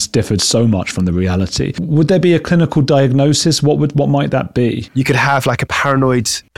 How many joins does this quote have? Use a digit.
2